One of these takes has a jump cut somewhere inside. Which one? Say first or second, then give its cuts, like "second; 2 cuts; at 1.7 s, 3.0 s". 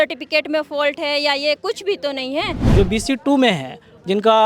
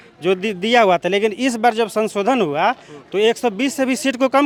first; 1 cut; at 2.6 s